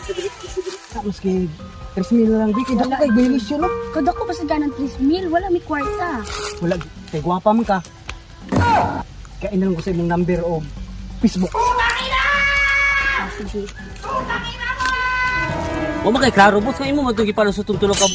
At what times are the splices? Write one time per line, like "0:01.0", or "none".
0:01.0
0:06.8
0:15.4